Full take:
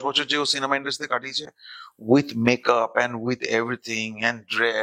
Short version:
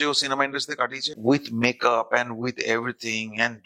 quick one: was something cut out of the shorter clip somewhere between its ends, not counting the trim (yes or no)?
yes